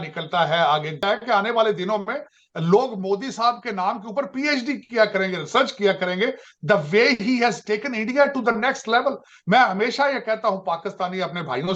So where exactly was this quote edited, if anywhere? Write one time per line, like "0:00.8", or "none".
0:01.0